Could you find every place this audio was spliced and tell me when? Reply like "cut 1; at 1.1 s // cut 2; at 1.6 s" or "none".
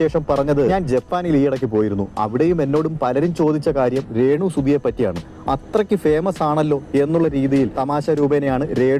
cut 1; at 5.4 s